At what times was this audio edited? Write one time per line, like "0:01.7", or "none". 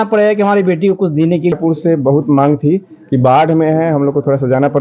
0:01.5